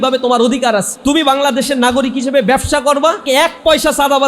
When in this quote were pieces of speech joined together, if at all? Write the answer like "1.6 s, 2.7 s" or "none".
0.9 s, 3.2 s